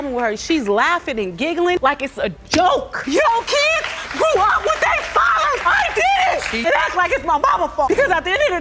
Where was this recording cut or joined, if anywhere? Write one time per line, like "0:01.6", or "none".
none